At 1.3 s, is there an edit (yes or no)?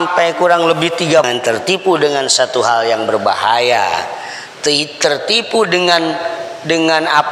yes